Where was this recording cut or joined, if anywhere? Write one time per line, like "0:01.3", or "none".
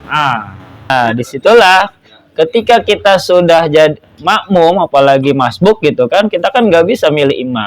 0:00.9